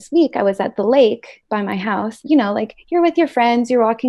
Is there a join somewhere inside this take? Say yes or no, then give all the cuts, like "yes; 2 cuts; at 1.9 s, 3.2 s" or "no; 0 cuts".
yes; 1 cut; at 2.2 s